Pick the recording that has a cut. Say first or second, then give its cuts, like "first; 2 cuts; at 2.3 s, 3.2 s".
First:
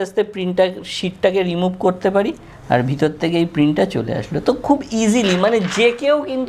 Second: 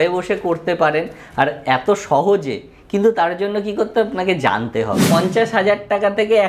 second; 1 cut; at 5.1 s